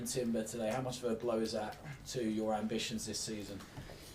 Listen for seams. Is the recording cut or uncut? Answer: cut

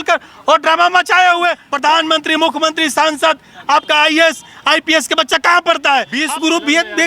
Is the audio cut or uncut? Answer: cut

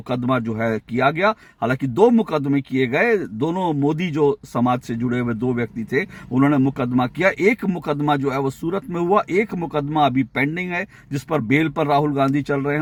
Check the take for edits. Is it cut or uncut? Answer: uncut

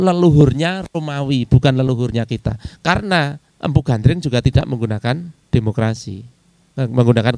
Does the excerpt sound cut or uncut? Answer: cut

